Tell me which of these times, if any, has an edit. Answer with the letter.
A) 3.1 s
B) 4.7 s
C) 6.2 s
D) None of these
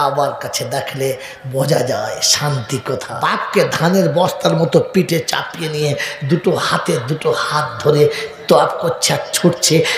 A